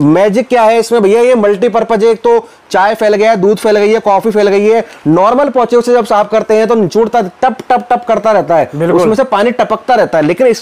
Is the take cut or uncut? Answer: uncut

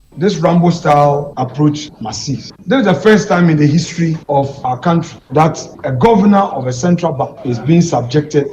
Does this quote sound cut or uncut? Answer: uncut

